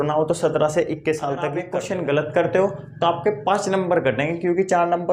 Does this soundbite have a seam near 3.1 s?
no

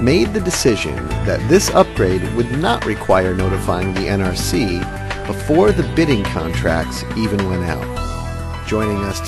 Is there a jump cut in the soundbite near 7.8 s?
yes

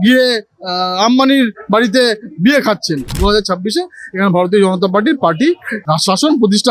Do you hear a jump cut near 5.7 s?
yes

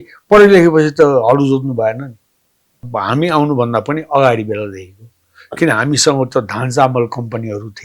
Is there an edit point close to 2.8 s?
yes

